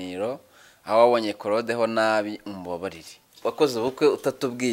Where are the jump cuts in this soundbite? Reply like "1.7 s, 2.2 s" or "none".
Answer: 3.3 s